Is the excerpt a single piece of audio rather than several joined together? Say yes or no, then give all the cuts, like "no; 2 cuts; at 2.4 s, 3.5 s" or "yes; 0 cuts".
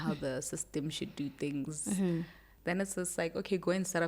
no; 1 cut; at 2.5 s